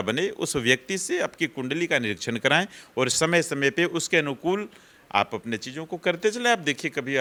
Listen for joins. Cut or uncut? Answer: uncut